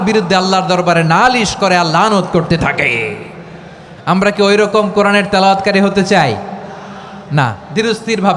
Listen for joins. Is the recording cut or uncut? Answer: uncut